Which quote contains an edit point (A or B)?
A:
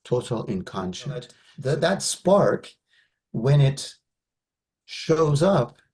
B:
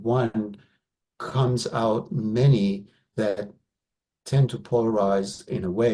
A